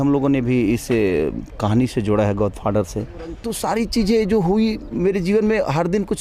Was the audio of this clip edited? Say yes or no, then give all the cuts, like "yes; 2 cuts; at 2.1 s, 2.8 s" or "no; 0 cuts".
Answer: yes; 1 cut; at 3.5 s